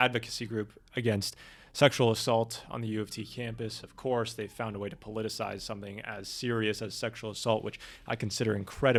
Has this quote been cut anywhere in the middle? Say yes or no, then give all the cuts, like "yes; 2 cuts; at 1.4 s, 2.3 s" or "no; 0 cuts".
no; 0 cuts